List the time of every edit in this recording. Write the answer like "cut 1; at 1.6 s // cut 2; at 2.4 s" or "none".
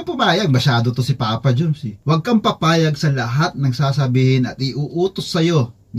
cut 1; at 2.0 s